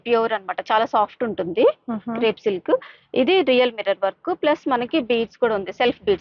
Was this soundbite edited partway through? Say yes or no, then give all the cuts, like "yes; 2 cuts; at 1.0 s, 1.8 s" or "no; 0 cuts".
no; 0 cuts